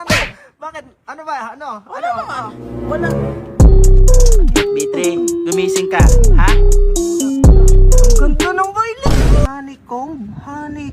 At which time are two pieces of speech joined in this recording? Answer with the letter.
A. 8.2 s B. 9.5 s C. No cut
B